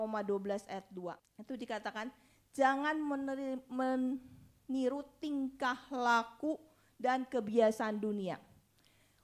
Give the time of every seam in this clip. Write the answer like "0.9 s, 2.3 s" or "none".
1.3 s